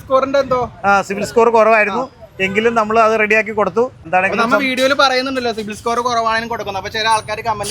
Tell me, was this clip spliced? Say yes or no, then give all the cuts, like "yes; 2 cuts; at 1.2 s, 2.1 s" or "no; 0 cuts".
yes; 1 cut; at 4.1 s